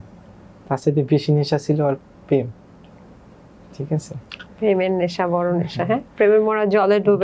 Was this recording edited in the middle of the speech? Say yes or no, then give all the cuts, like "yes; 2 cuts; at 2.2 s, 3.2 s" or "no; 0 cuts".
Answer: no; 0 cuts